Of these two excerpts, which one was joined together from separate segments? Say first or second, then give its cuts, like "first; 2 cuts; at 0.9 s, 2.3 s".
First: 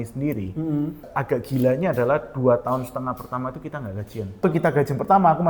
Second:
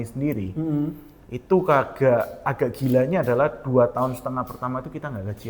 first; 2 cuts; at 1.1 s, 4.4 s